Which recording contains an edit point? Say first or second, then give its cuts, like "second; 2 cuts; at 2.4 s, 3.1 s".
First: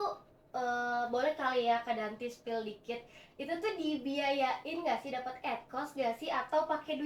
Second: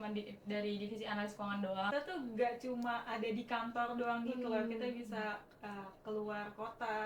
second; 1 cut; at 1.9 s